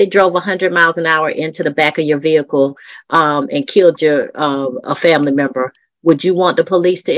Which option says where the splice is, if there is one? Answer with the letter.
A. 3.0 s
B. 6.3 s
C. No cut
C